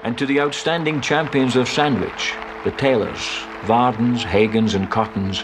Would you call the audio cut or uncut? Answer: uncut